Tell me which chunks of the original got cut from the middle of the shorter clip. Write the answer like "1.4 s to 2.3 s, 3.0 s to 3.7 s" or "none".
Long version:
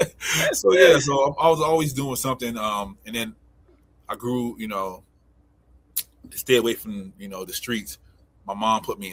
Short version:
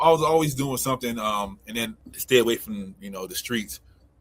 3.5 s to 6.3 s